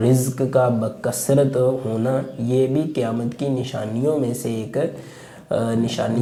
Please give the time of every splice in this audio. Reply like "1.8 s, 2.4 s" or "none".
none